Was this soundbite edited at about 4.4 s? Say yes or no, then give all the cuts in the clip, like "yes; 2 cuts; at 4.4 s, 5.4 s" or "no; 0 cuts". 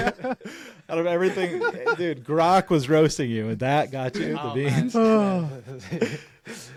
no; 0 cuts